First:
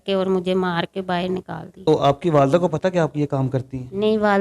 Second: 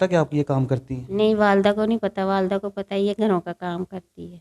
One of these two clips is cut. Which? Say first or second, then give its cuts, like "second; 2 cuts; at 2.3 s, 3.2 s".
first; 1 cut; at 1.9 s